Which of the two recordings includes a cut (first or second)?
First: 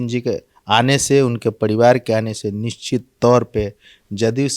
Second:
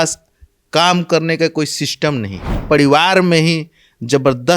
second